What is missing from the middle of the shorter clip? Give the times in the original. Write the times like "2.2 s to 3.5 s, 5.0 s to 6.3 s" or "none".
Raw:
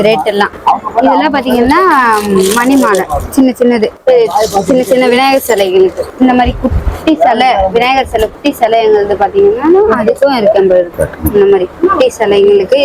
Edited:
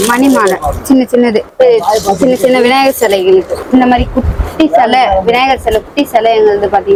none